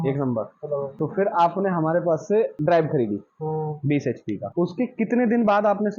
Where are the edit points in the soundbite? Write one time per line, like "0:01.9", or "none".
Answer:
0:00.9
0:02.5
0:04.5